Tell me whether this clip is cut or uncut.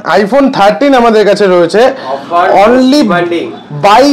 uncut